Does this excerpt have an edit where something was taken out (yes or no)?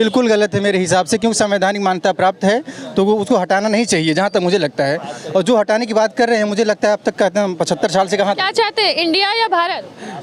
no